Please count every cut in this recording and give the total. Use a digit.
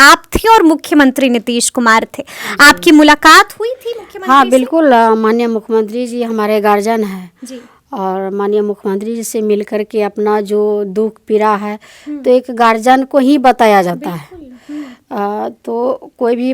0